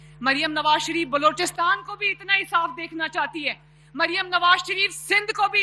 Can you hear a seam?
no; 0 cuts

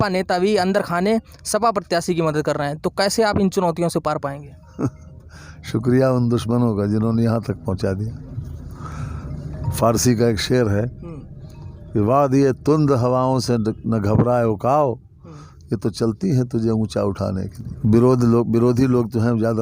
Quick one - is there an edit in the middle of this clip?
no; 0 cuts

